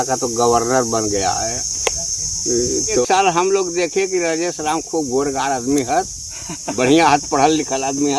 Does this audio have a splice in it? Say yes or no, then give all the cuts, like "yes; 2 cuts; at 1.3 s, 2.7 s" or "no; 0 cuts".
no; 0 cuts